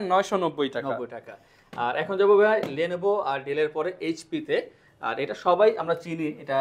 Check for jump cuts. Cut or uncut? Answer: uncut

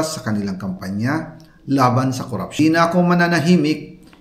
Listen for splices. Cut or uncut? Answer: cut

